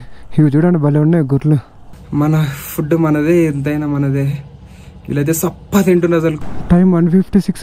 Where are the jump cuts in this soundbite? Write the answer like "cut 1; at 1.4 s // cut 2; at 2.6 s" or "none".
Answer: cut 1; at 1.9 s // cut 2; at 6.4 s